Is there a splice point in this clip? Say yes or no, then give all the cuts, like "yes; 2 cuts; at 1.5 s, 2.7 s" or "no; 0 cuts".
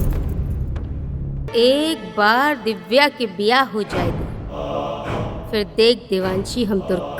yes; 1 cut; at 1.5 s